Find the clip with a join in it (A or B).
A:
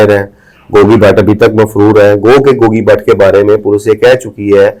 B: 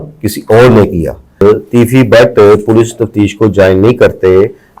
B